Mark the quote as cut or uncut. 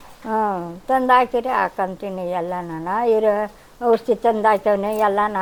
uncut